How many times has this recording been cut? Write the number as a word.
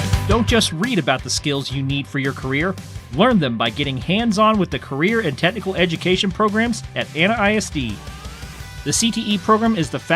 one